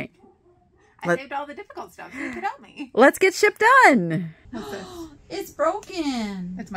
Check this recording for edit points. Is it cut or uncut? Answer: cut